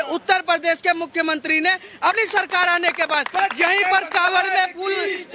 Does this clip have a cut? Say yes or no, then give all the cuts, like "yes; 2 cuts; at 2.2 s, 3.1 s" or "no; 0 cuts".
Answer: yes; 1 cut; at 2.1 s